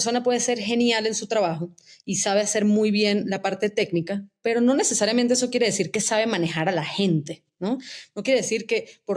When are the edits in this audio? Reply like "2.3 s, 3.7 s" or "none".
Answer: none